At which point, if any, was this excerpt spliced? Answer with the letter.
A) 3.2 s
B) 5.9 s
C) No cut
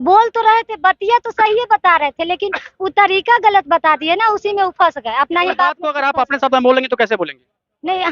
B